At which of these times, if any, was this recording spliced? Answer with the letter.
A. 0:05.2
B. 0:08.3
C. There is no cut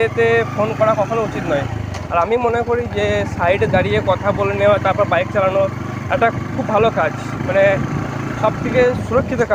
C